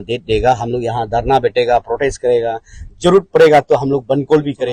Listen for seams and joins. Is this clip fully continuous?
yes; 0 cuts

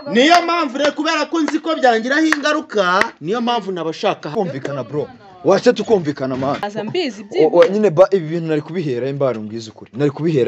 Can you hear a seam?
yes; 2 cuts; at 4.3 s, 6.7 s

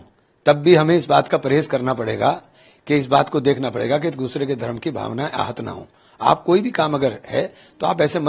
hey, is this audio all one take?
yes; 0 cuts

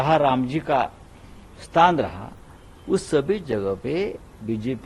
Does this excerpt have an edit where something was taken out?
no; 0 cuts

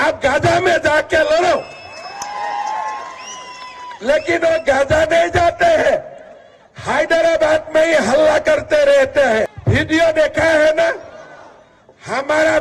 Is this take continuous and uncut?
no; 1 cut; at 9.6 s

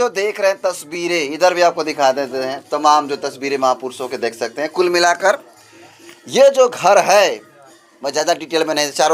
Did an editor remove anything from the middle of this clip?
no; 0 cuts

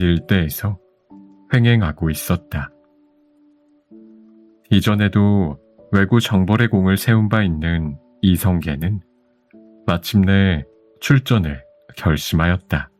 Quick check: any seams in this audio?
no; 0 cuts

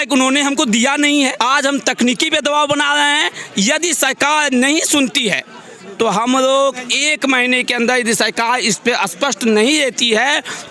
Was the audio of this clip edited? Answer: yes; 1 cut; at 1.3 s

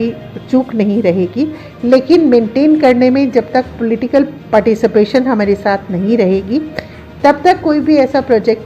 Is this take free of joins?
yes; 0 cuts

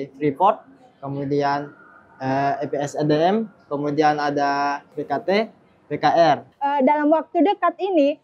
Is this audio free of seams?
no; 2 cuts; at 4.9 s, 6.5 s

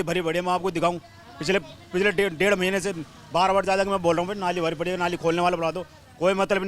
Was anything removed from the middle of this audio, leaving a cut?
no; 0 cuts

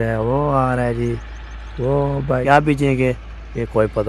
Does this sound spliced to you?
yes; 1 cut; at 2.4 s

